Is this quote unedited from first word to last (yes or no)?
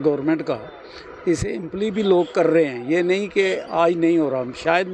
yes